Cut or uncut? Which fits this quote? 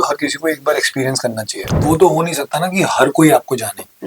cut